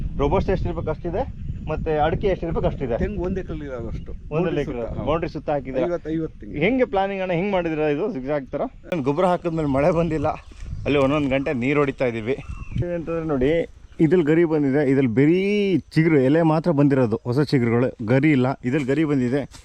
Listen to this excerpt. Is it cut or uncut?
cut